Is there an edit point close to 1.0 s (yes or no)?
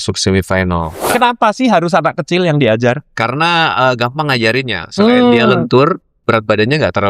yes